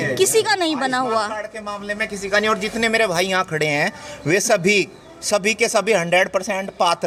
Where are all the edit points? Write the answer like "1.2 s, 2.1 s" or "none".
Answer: none